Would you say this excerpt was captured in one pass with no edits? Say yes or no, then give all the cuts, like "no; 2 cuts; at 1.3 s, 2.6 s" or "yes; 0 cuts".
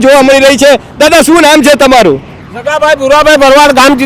yes; 0 cuts